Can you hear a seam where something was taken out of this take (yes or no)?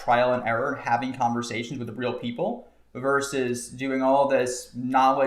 no